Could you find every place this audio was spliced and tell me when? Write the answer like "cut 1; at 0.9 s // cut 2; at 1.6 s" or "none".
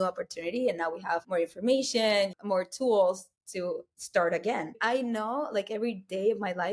cut 1; at 1.2 s // cut 2; at 2.3 s // cut 3; at 3.9 s // cut 4; at 4.8 s